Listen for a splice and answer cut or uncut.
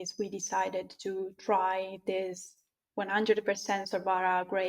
uncut